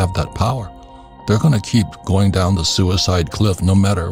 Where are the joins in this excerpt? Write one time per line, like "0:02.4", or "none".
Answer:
none